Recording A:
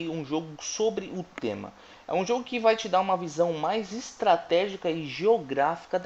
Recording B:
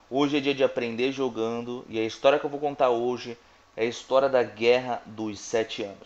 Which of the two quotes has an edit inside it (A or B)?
A